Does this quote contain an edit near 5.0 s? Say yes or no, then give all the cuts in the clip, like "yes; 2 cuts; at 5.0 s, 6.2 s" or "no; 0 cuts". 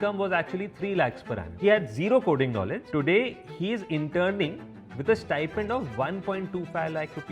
no; 2 cuts; at 1.5 s, 2.8 s